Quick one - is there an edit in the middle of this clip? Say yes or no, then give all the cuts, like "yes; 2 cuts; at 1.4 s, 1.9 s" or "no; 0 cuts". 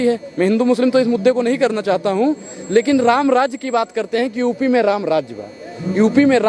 no; 0 cuts